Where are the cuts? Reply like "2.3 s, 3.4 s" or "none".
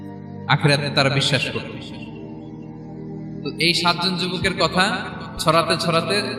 2.2 s, 3.4 s